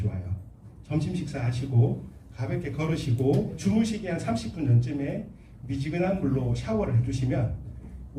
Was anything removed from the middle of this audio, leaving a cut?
yes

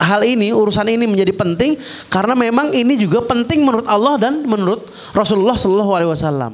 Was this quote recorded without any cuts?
yes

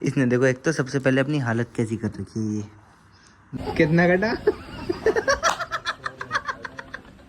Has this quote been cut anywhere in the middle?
yes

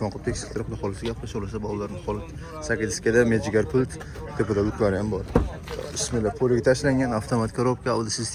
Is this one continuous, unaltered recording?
yes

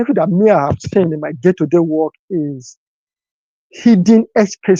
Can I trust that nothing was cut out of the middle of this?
yes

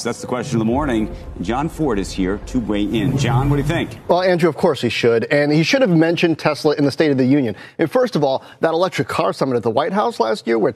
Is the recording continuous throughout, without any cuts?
yes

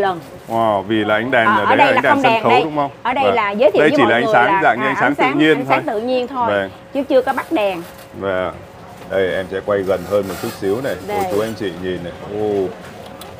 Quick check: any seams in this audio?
no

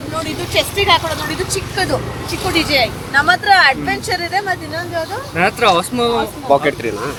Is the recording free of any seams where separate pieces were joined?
yes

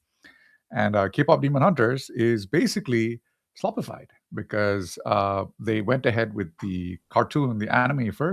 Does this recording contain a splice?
yes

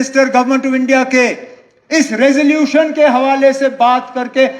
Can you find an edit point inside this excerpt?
no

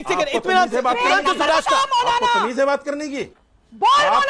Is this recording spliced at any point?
yes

